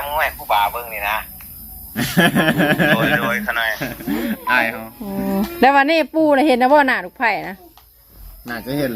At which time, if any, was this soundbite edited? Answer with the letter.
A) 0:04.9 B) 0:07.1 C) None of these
A